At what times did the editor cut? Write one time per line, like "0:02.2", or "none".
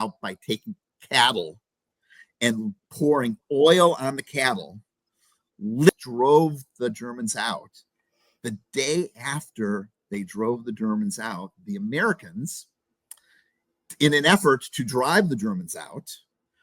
0:05.9